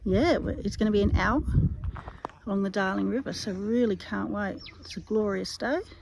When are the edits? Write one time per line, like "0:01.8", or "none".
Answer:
none